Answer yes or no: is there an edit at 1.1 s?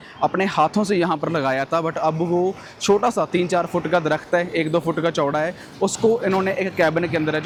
no